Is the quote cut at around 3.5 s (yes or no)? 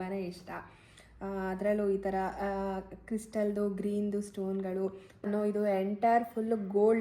no